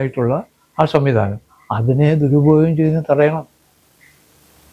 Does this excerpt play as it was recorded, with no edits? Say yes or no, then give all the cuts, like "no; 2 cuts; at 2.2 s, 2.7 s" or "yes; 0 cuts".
yes; 0 cuts